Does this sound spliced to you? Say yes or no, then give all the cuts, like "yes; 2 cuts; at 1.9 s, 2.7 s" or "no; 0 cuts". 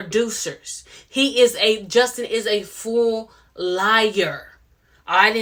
no; 0 cuts